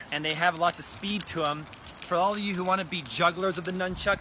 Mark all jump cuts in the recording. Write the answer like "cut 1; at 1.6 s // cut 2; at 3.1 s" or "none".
cut 1; at 2.0 s